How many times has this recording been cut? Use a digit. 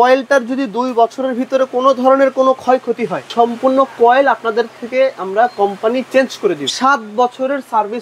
2